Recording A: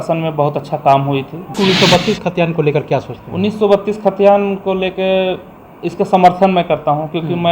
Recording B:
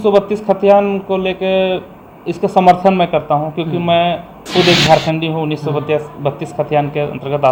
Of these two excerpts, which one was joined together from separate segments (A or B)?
A